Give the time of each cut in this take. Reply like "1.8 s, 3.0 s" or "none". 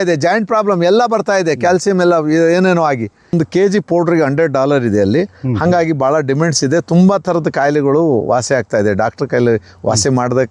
3.3 s